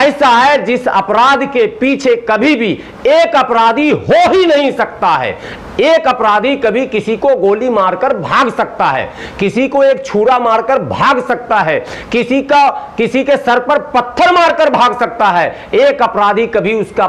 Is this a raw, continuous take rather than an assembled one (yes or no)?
yes